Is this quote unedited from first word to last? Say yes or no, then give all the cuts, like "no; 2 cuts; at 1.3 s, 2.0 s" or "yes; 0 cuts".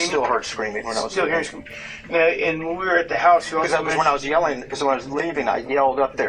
yes; 0 cuts